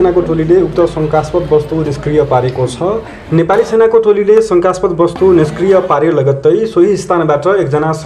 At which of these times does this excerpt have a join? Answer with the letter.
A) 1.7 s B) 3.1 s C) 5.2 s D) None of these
B